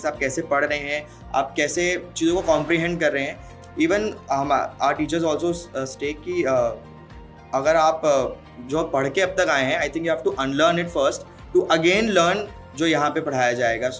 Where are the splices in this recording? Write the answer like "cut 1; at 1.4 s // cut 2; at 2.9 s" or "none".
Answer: none